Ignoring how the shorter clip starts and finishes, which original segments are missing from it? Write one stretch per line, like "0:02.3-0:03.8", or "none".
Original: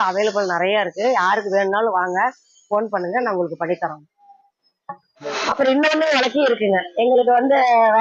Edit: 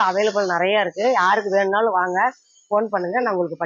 none